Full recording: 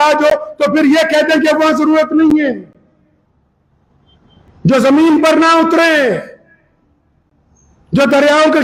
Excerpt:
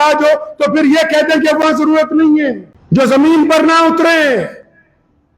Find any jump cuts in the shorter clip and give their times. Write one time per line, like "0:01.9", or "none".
0:02.7